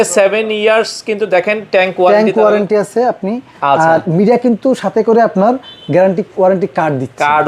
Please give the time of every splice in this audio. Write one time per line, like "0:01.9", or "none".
none